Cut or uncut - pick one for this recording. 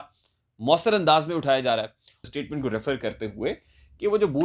cut